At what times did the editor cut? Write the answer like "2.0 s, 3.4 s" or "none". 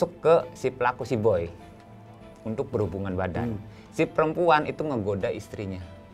none